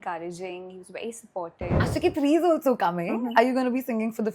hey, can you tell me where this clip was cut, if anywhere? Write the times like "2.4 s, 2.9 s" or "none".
1.8 s